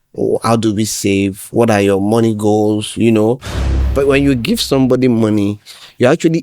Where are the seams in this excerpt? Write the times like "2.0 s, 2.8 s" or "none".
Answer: 3.6 s